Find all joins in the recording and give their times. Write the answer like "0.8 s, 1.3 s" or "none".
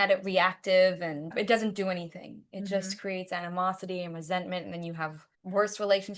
1.3 s